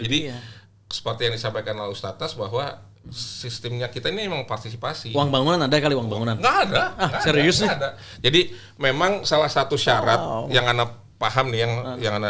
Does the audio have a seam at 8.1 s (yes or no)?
no